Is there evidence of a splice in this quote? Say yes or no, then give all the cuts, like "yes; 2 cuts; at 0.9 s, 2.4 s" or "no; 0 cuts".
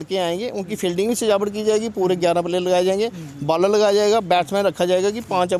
no; 0 cuts